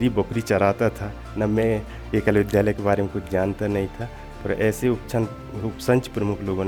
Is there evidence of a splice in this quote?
no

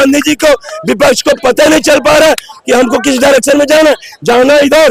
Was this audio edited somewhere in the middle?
no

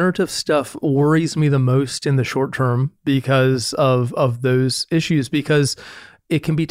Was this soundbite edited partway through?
no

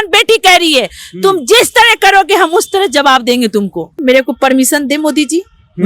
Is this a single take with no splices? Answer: no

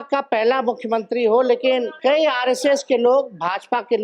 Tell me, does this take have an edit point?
yes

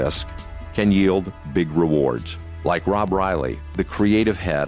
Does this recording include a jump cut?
no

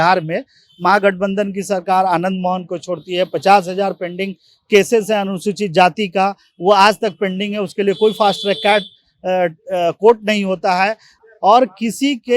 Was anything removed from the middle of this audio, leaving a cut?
yes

